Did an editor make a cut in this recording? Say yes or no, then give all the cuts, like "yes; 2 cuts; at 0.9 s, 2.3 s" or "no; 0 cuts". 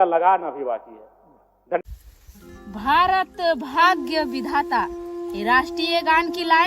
yes; 1 cut; at 1.8 s